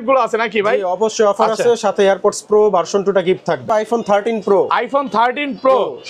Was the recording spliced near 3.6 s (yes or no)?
yes